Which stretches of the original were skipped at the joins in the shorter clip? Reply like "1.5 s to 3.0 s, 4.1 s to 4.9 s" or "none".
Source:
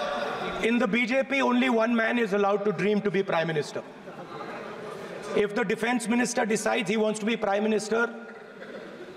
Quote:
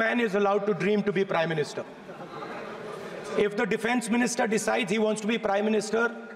none